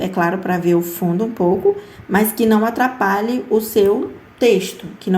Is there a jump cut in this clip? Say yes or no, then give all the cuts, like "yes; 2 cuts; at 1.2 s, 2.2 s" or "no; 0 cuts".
yes; 1 cut; at 4.2 s